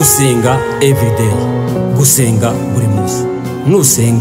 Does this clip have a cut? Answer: no; 0 cuts

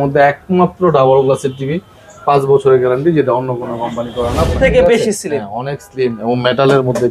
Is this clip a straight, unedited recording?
no; 1 cut; at 4.5 s

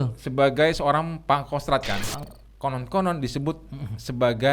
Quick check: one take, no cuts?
no; 1 cut; at 2.3 s

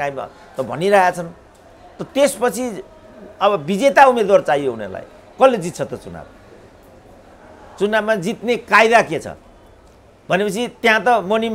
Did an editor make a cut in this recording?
no; 0 cuts

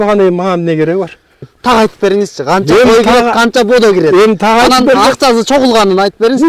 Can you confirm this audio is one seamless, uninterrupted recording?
no; 1 cut; at 1.5 s

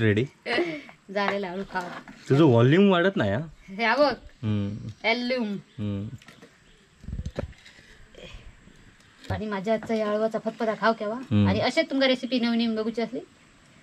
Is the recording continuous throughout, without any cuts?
no; 1 cut; at 9.3 s

